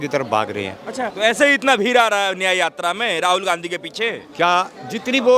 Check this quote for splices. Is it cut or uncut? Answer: cut